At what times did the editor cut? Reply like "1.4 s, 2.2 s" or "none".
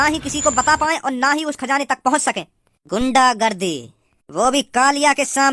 none